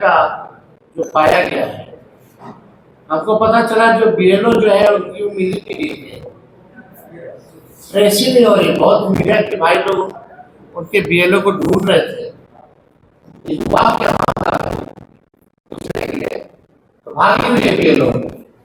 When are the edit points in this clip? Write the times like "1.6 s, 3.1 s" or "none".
none